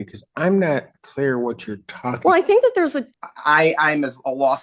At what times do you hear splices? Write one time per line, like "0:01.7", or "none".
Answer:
0:03.1